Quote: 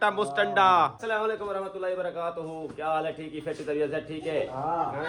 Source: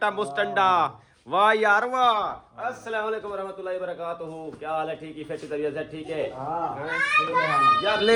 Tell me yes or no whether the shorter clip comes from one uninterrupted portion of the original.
no